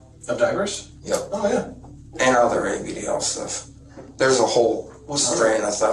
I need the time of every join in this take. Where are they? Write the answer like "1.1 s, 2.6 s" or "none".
2.2 s

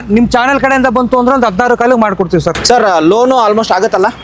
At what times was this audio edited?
2.5 s

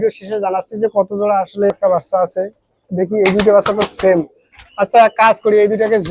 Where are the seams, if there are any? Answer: 1.8 s

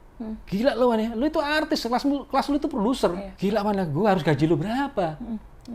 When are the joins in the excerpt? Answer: 3.3 s

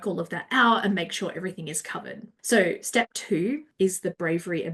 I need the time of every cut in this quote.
2.3 s, 3.7 s

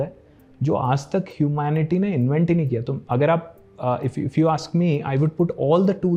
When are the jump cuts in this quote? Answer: none

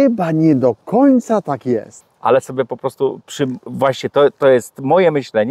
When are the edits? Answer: 1.9 s

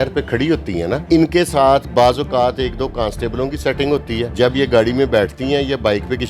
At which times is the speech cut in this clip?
1.0 s, 4.3 s

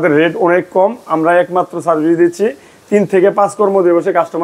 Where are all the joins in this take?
none

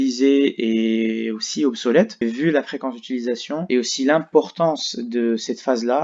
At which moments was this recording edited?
2.2 s

